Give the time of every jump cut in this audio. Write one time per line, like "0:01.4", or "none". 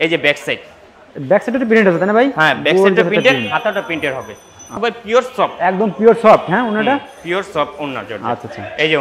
0:04.8